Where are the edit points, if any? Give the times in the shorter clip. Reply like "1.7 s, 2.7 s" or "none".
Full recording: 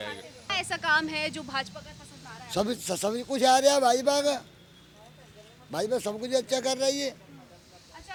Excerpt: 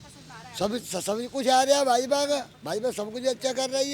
2.5 s